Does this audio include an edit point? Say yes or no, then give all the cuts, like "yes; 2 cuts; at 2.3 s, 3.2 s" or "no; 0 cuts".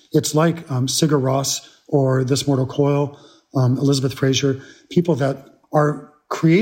yes; 1 cut; at 5.5 s